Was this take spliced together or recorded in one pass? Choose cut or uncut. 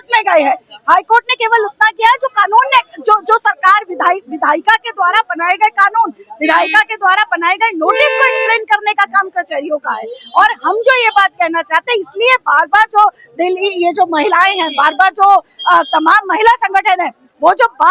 uncut